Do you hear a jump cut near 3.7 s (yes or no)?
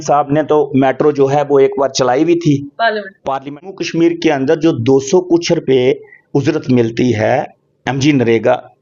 yes